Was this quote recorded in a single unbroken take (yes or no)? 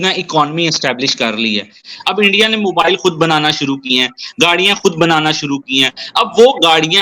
no